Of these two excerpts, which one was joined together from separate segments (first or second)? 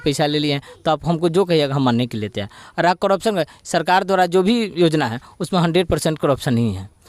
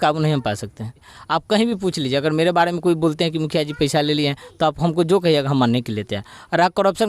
second